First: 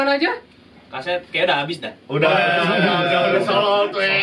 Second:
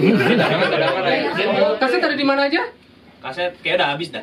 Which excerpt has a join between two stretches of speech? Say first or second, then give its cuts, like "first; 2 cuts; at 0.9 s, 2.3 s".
second; 1 cut; at 1.4 s